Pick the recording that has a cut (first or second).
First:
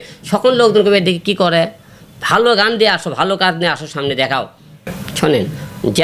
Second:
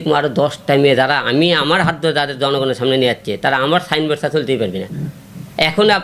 first